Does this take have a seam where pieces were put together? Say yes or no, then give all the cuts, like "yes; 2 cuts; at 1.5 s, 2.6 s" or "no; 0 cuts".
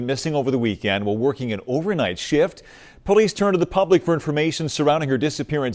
no; 0 cuts